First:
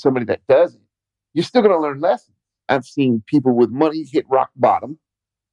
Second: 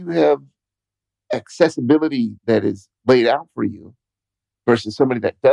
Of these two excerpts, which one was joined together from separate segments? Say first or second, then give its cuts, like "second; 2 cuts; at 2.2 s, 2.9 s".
first; 1 cut; at 2.5 s